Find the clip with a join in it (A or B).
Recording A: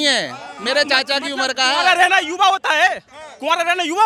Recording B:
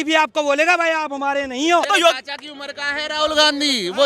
B